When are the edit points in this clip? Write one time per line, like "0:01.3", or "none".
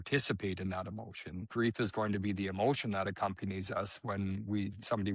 0:01.4

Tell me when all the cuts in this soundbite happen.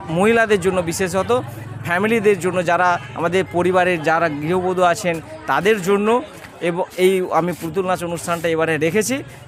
none

